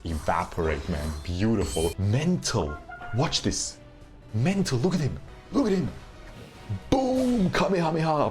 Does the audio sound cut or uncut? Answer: cut